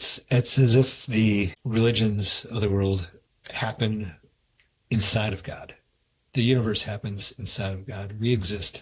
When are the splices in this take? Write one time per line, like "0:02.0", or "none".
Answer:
0:01.6